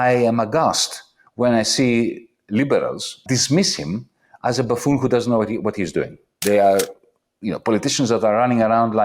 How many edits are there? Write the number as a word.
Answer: two